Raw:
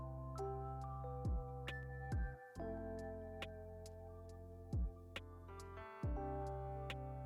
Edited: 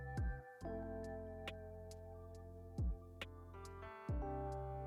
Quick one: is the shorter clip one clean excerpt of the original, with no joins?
yes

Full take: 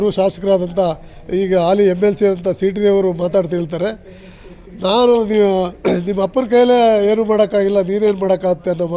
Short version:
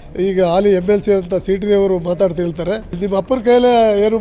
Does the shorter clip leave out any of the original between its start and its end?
yes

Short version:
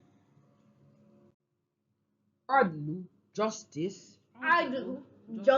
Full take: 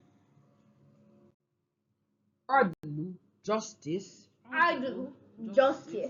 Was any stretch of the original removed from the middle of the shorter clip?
yes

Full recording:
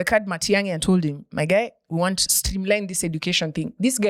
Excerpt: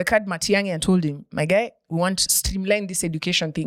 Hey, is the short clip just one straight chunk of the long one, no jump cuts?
yes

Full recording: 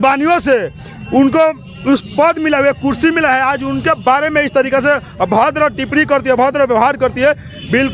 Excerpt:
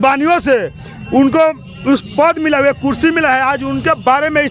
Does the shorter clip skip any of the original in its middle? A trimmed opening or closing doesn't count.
no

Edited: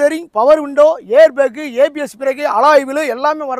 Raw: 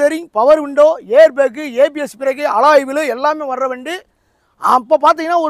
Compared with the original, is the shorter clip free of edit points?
yes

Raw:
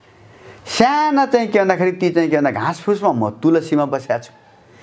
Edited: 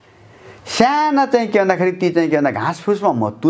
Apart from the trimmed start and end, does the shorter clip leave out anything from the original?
no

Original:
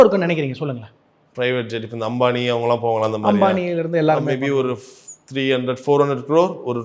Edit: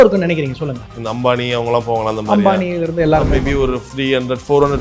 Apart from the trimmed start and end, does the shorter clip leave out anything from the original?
yes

